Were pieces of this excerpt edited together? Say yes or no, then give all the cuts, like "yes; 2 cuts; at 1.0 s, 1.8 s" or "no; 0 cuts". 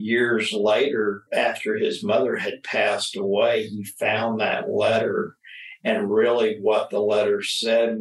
yes; 1 cut; at 1.2 s